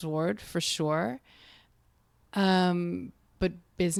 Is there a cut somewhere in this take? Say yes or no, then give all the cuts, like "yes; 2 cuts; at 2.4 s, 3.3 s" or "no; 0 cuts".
no; 0 cuts